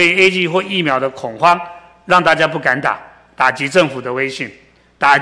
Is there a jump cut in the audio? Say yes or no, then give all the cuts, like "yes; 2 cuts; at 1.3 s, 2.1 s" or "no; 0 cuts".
no; 0 cuts